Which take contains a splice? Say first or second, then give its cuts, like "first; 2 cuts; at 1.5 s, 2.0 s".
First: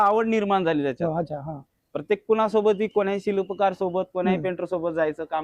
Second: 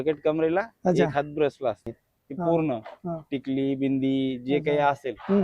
second; 1 cut; at 2.0 s